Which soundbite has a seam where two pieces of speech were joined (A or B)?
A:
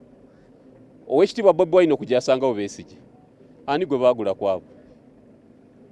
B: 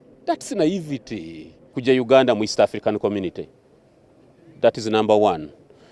B